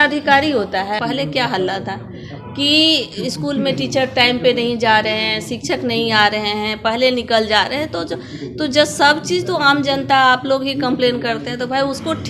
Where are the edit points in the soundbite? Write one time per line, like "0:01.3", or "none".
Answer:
0:01.0